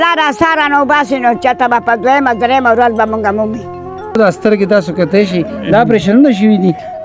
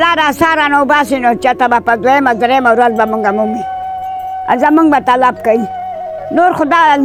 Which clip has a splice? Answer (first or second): first